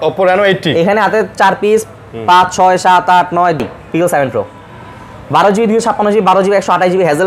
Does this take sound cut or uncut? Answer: cut